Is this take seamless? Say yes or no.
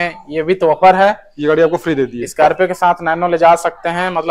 yes